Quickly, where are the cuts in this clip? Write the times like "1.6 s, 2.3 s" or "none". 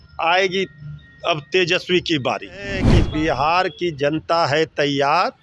2.9 s